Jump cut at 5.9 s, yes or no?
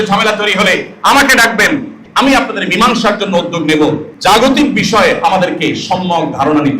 no